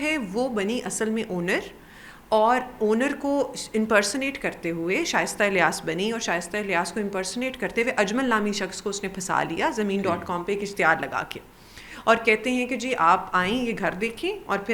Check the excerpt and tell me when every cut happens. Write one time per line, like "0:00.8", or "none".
none

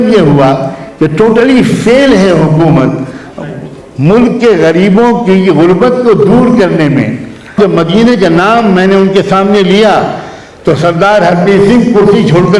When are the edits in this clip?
0:07.5

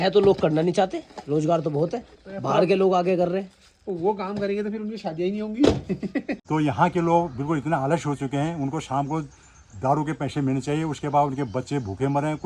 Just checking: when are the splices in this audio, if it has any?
0:06.4

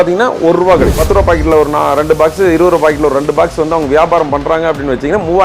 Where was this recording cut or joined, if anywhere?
0:01.0

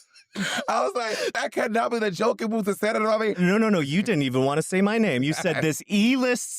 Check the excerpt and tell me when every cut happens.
0:01.4
0:03.4

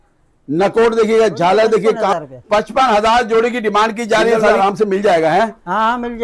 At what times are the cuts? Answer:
0:02.1
0:04.5

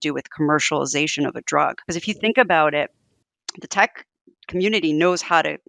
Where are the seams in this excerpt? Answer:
0:01.9

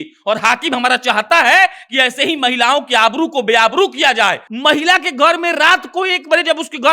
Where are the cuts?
0:04.5

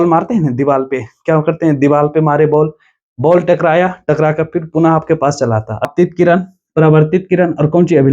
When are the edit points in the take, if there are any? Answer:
0:05.9

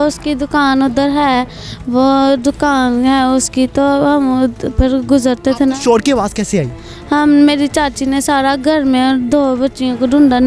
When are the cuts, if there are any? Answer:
none

